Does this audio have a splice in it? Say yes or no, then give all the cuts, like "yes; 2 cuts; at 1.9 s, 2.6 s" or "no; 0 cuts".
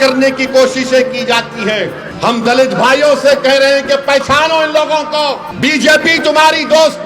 yes; 2 cuts; at 2.0 s, 5.5 s